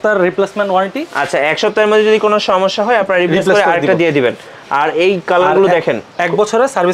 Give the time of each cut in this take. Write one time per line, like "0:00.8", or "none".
none